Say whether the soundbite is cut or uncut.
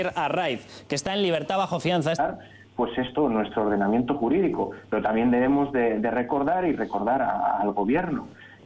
uncut